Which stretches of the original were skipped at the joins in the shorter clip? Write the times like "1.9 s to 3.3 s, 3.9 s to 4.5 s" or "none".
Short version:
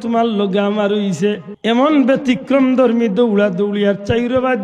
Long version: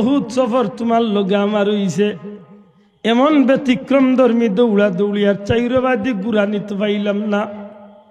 2.3 s to 2.9 s

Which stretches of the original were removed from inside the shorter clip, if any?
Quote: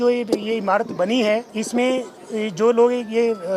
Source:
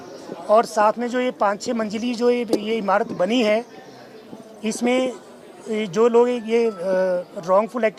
3.7 s to 4.6 s, 5.3 s to 5.5 s

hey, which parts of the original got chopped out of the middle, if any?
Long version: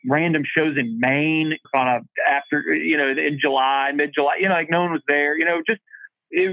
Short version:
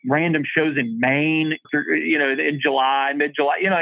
1.6 s to 2.4 s

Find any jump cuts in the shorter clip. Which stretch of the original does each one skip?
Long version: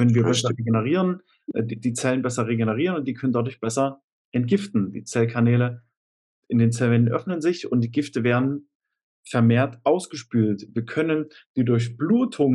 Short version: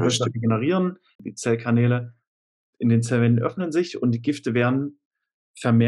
1.5 s to 4.9 s

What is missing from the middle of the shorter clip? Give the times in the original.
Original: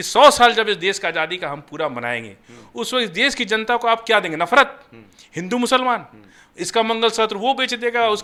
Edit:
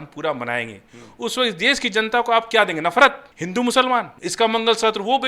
4.9 s to 5.3 s, 6.1 s to 6.5 s

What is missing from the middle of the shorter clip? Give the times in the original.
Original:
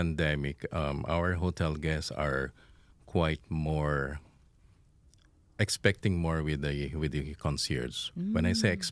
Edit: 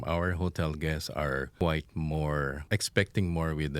2.5 s to 3.1 s, 4.1 s to 5.5 s

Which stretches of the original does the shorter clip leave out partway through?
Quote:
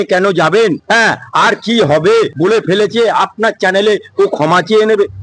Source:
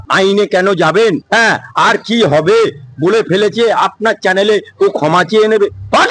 2.7 s to 2.9 s

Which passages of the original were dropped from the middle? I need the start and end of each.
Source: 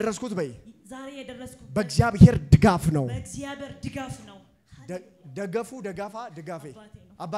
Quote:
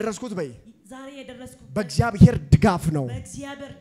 none

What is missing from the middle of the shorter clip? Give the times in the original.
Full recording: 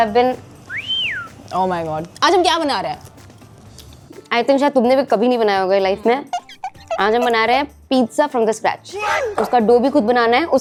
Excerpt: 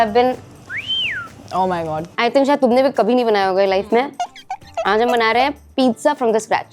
2.1 s to 4.2 s

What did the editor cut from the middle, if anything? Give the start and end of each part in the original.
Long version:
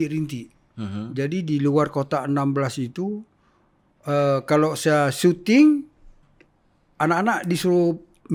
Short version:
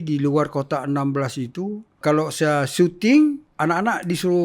3.4 s to 4.4 s, 5.9 s to 6.9 s

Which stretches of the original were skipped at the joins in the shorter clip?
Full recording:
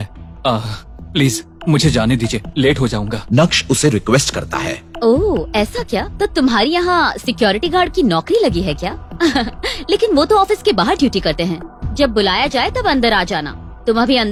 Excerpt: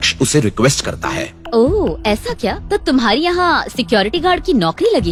none

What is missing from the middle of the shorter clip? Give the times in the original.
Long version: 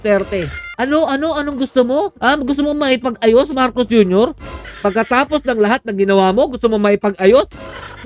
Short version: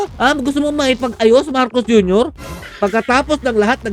none

